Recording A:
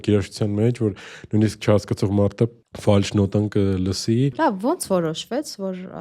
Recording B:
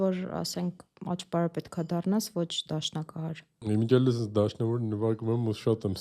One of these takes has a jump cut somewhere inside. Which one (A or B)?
A